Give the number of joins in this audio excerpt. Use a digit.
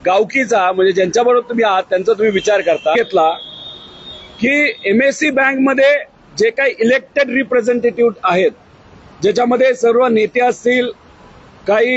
1